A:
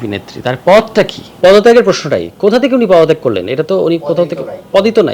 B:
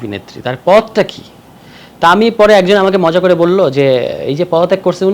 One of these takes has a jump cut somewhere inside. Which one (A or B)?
A